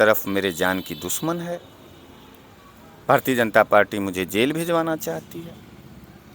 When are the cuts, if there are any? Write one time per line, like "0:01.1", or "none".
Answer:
none